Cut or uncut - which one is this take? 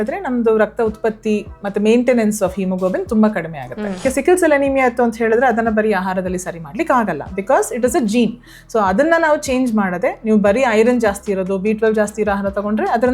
cut